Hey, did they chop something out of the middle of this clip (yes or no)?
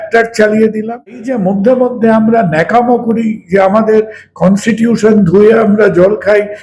yes